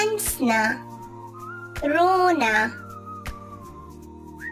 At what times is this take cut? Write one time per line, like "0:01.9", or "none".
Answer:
none